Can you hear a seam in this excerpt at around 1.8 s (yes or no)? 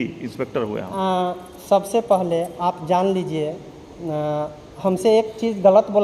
no